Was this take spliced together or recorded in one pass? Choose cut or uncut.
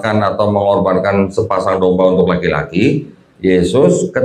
cut